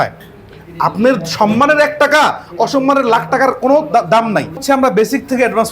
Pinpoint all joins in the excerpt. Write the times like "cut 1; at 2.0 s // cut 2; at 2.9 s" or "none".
cut 1; at 4.6 s